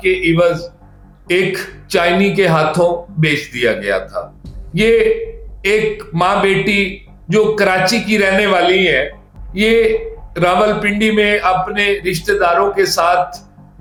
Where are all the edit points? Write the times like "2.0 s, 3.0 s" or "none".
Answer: none